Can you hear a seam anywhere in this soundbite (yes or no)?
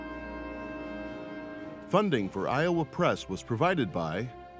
yes